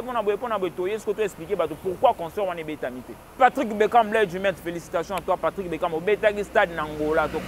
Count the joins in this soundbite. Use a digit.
1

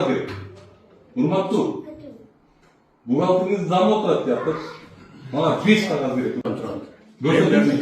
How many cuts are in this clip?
1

